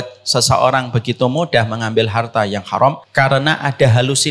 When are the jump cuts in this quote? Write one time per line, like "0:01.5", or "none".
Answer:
0:03.0